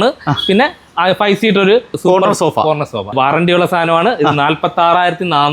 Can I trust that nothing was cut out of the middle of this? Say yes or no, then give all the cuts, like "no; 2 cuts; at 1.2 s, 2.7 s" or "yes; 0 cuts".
no; 2 cuts; at 2.0 s, 3.1 s